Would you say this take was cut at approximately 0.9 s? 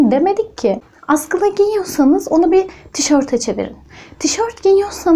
yes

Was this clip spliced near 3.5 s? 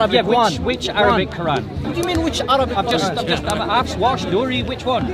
no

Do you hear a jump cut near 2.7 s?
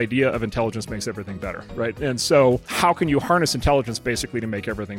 yes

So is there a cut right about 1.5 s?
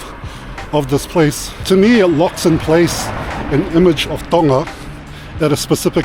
yes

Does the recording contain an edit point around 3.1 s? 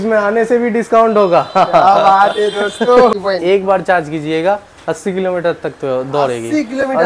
yes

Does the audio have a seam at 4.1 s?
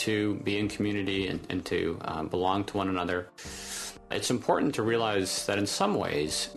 yes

